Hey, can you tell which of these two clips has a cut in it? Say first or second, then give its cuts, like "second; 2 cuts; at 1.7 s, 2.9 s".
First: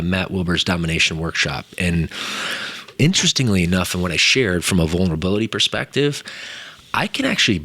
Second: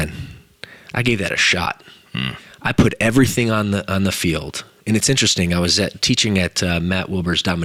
first; 1 cut; at 2.9 s